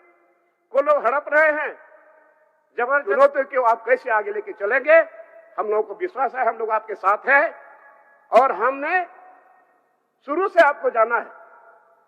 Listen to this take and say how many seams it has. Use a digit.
1